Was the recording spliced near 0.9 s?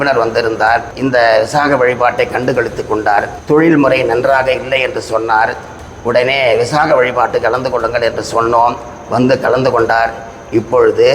yes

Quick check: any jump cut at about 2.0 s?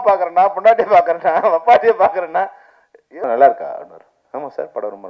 no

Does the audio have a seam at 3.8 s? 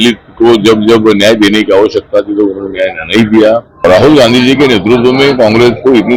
yes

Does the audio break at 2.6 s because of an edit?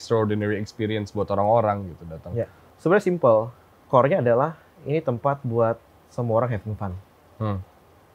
yes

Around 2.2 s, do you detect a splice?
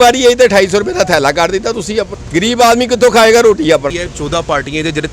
yes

